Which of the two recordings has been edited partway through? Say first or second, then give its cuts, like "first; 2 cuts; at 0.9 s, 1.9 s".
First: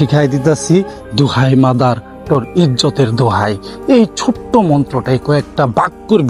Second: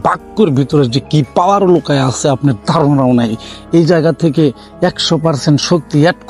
first; 1 cut; at 1.0 s